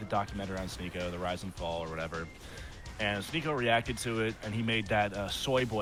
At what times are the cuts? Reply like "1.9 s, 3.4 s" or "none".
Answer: none